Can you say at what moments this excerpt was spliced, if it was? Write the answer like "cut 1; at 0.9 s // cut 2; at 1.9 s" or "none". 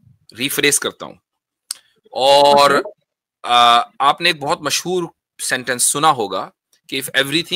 none